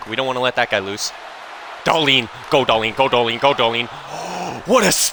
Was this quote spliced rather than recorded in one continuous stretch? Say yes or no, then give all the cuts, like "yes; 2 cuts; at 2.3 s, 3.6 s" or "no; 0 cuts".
no; 0 cuts